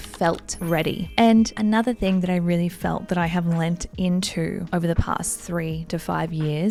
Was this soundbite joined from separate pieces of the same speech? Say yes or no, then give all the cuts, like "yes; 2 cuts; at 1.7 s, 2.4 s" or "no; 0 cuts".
no; 0 cuts